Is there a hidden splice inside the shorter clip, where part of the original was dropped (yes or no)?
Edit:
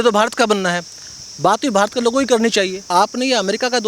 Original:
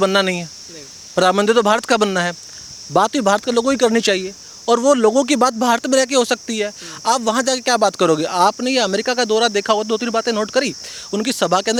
yes